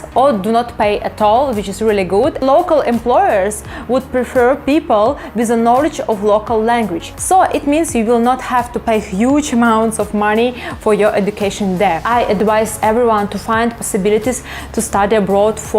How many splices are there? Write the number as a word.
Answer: three